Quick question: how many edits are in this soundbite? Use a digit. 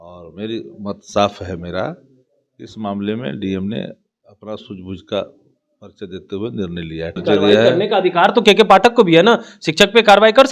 1